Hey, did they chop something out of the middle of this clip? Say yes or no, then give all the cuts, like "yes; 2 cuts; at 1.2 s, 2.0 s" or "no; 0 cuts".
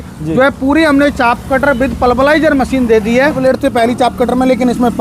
yes; 1 cut; at 3.4 s